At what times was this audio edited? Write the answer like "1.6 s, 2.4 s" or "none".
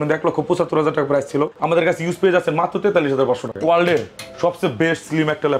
1.6 s, 3.5 s